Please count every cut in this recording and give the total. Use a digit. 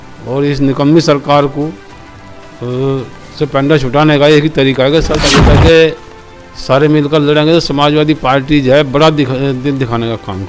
1